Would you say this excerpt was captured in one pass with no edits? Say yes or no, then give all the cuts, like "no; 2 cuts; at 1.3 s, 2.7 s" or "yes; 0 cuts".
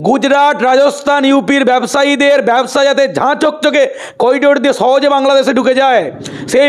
yes; 0 cuts